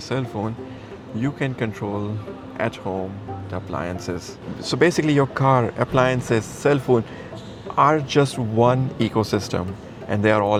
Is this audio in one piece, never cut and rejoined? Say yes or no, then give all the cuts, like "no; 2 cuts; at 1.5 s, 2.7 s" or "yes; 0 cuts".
yes; 0 cuts